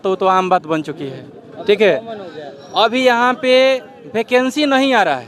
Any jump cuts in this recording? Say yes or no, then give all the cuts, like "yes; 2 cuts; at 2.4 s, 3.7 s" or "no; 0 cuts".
no; 0 cuts